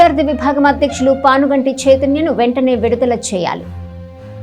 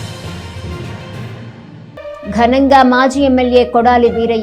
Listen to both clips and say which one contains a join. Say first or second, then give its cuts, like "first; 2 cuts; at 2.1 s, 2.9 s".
second; 1 cut; at 1.7 s